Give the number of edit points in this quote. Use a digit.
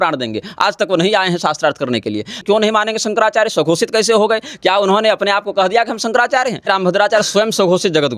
2